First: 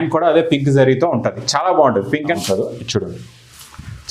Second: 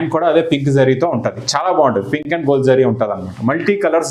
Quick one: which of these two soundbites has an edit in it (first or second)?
first